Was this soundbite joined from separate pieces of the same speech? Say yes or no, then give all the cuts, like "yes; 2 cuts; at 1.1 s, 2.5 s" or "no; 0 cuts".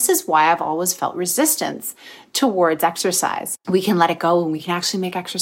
yes; 2 cuts; at 3.5 s, 4.6 s